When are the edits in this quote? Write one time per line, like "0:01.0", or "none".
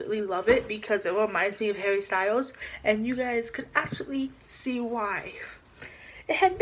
0:02.6